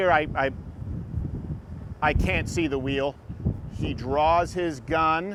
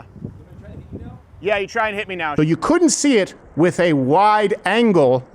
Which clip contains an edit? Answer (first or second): second